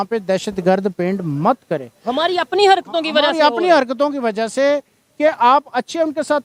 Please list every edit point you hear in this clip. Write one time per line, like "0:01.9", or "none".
none